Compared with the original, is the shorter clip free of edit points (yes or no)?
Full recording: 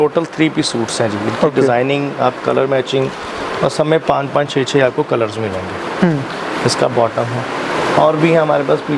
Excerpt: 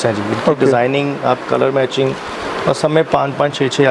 yes